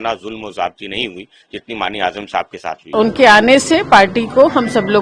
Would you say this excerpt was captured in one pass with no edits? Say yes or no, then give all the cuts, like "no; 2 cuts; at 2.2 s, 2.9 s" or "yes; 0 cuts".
no; 1 cut; at 2.9 s